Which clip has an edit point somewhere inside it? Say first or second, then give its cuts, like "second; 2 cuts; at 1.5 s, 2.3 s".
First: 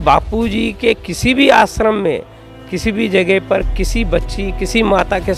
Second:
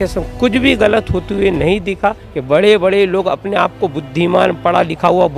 second; 1 cut; at 2.3 s